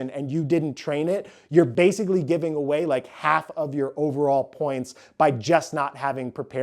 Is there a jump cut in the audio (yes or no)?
yes